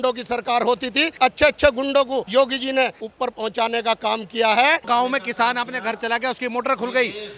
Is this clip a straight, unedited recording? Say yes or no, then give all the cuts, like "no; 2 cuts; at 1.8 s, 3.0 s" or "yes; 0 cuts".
no; 4 cuts; at 1.1 s, 2.3 s, 3.0 s, 4.8 s